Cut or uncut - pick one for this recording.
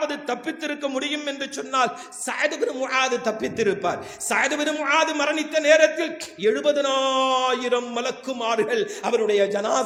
uncut